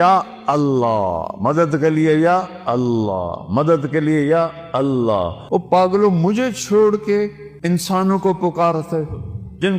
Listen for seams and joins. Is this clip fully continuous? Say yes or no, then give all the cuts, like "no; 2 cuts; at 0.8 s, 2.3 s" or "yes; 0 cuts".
no; 2 cuts; at 5.4 s, 7.5 s